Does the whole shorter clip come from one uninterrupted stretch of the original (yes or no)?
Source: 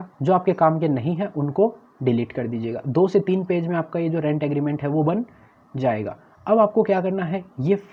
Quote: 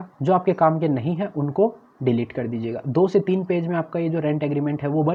yes